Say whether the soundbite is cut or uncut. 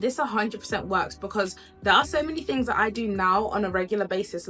uncut